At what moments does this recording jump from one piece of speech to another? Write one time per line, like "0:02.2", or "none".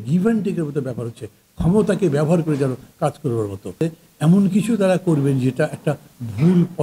0:03.8